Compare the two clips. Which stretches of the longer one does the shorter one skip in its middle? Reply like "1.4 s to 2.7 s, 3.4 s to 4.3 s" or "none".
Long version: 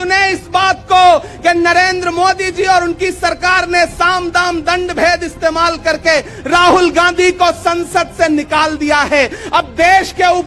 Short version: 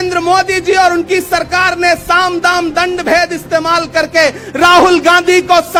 none